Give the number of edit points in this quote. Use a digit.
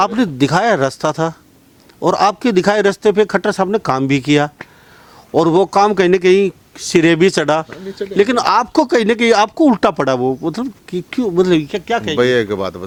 0